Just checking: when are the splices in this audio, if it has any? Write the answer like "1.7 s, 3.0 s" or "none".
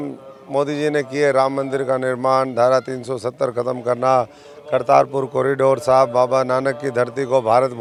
none